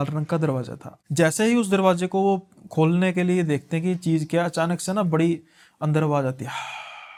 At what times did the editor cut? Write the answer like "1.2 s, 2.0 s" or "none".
none